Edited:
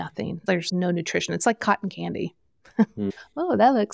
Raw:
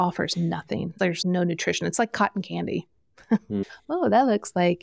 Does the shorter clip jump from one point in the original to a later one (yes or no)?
no